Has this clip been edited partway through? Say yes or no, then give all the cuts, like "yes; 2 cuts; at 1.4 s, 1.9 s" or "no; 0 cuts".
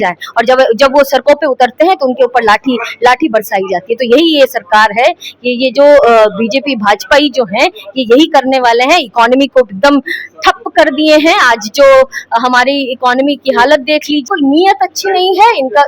yes; 1 cut; at 14.3 s